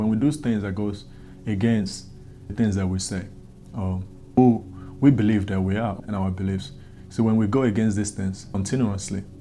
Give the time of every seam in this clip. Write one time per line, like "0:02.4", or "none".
0:02.5
0:04.4
0:06.0
0:08.5